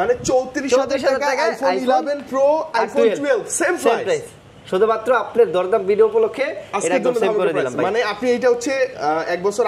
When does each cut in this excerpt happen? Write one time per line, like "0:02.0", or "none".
none